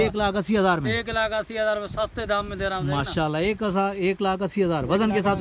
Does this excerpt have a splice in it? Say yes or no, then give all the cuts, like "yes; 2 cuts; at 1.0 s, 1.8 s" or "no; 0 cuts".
no; 0 cuts